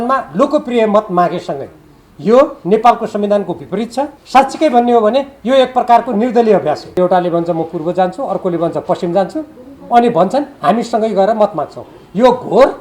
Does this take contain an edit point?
yes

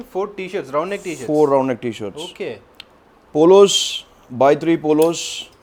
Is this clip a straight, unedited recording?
yes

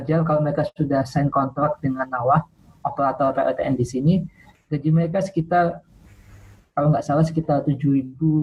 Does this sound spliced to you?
no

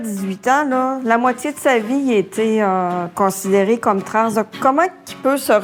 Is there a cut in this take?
no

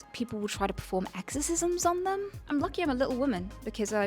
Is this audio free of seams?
no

